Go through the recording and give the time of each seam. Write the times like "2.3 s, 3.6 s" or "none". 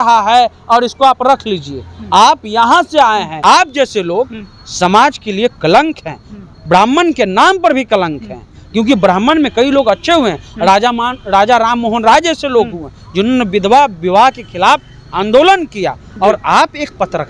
3.3 s